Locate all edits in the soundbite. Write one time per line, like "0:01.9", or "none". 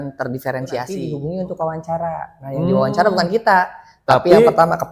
0:01.0